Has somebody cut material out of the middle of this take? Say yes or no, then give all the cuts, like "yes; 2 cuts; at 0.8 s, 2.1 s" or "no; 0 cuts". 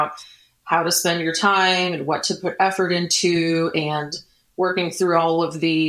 no; 0 cuts